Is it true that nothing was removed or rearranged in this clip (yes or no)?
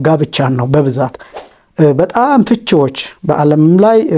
no